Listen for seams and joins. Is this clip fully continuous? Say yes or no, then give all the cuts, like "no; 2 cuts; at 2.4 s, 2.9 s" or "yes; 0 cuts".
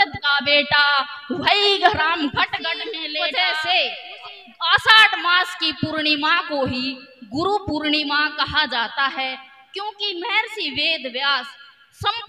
no; 1 cut; at 3.1 s